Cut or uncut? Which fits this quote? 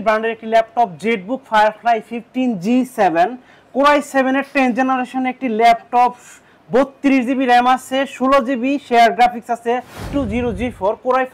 cut